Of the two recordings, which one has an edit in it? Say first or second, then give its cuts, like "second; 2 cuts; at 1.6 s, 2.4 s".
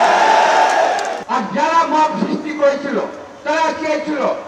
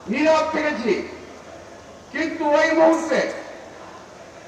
first; 1 cut; at 1.2 s